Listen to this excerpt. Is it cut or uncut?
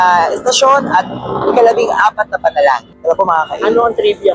uncut